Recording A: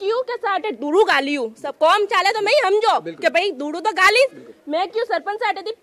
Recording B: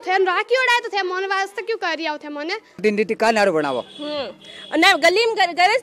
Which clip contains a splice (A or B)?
B